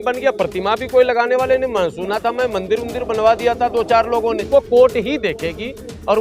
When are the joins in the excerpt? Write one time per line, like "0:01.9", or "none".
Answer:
0:04.4